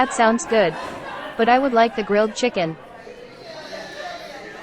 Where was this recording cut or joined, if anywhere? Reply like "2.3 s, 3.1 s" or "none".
2.8 s